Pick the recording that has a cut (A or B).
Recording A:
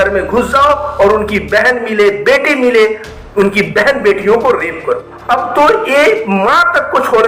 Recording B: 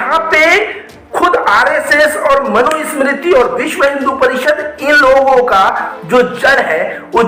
A